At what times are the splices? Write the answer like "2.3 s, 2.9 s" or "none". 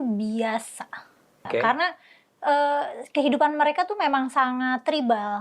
1.4 s